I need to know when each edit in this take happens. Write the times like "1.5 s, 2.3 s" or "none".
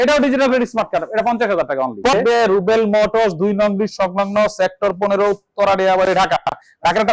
2.1 s